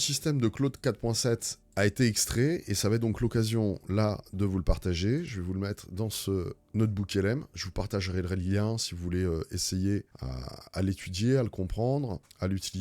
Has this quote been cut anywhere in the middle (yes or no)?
no